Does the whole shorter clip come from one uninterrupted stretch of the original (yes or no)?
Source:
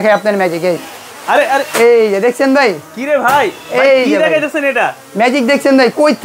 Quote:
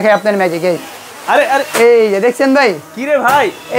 yes